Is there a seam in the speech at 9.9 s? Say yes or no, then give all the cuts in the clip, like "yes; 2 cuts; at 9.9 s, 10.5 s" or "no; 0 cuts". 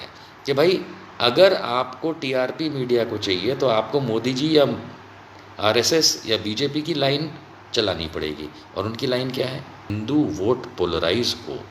yes; 1 cut; at 9.9 s